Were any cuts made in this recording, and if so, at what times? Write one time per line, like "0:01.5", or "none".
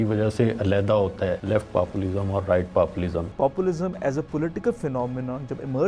0:01.4
0:03.3